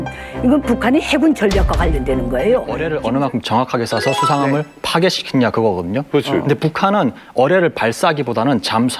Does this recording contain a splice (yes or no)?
yes